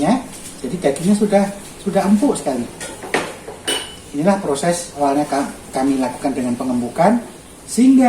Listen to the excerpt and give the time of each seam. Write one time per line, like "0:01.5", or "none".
0:05.0